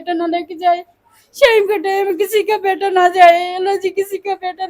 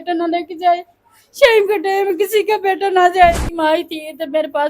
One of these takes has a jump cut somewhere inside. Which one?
second; 1 cut; at 3.4 s

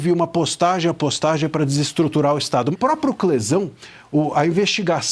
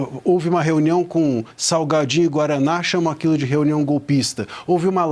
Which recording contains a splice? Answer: first; 1 cut; at 2.7 s

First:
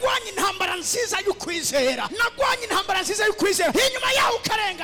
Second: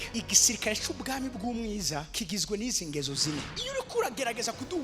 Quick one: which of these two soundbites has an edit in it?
second; 1 cut; at 3.5 s

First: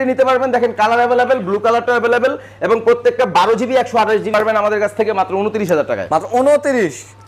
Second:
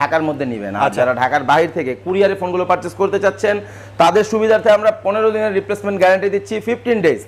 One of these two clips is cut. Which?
first; 1 cut; at 4.3 s

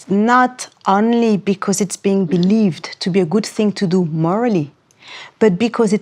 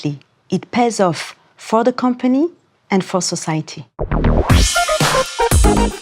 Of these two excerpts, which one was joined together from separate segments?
second; 1 cut; at 3.9 s

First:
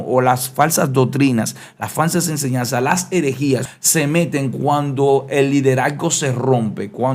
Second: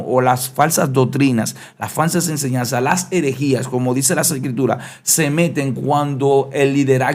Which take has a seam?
first; 1 cut; at 3.7 s

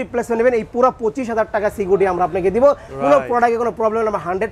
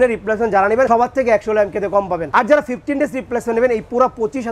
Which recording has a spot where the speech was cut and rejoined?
second; 2 cuts; at 0.9 s, 2.2 s

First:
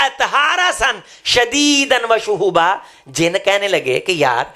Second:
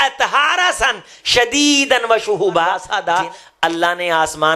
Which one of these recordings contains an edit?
second; 1 cut; at 2.9 s

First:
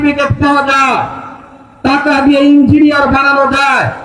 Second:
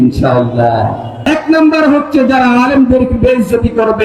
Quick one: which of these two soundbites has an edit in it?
second; 1 cut; at 1.2 s

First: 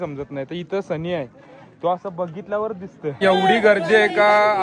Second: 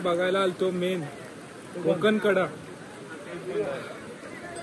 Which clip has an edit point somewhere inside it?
first; 1 cut; at 3.2 s

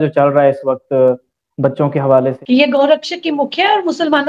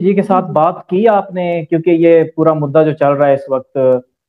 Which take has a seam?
first; 1 cut; at 2.4 s

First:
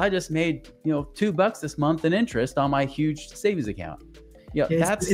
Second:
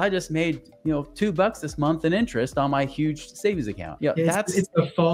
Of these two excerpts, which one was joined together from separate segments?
second; 1 cut; at 3.8 s

